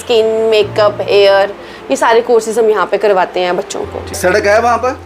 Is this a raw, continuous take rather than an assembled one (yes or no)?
no